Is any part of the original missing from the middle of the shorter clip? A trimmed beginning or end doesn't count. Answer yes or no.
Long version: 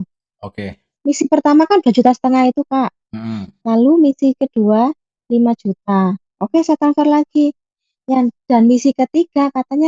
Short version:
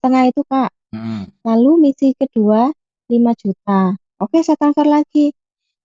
no